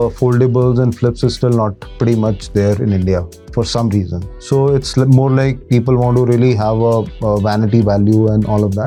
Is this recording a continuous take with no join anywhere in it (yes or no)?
yes